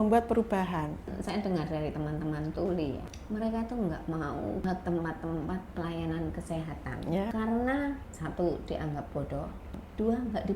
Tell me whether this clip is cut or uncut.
cut